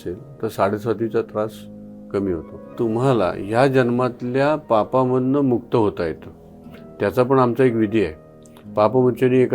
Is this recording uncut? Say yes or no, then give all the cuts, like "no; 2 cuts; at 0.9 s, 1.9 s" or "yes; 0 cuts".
no; 1 cut; at 2.7 s